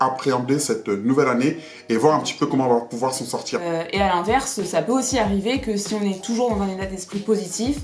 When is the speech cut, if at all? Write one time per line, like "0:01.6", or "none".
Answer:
0:03.6